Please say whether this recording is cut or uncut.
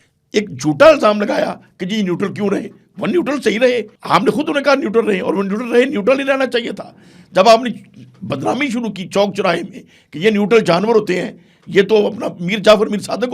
cut